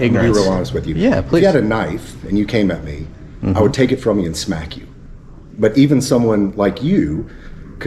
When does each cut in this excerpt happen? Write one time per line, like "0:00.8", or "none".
none